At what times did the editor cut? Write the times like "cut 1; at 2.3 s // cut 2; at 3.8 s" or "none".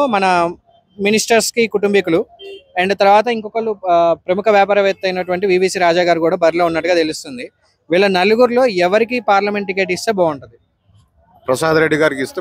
none

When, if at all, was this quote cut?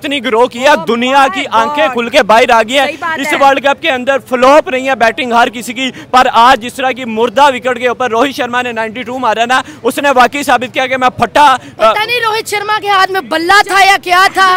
none

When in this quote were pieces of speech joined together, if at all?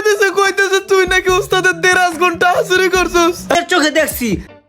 cut 1; at 3.5 s

